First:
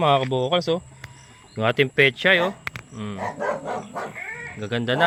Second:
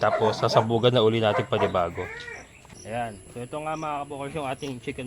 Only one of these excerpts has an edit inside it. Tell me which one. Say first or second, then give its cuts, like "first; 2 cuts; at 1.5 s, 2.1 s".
second; 1 cut; at 2.2 s